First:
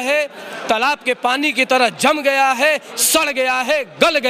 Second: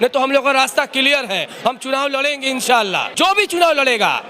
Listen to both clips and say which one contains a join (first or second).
second